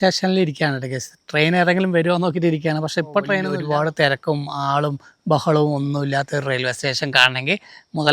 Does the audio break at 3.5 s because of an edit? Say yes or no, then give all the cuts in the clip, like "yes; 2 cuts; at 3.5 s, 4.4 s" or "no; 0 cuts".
yes; 1 cut; at 3.5 s